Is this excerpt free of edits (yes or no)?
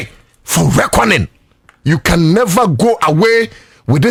yes